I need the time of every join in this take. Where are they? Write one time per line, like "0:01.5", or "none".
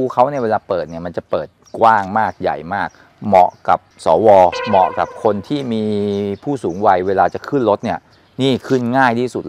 none